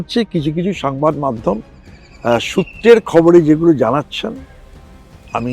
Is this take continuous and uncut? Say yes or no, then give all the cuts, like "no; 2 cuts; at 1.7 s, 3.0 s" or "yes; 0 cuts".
yes; 0 cuts